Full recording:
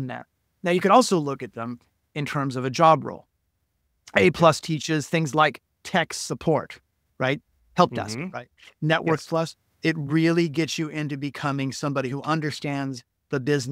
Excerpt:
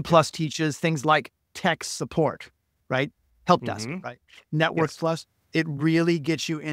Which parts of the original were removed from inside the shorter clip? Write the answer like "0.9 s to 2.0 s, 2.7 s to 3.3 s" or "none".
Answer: none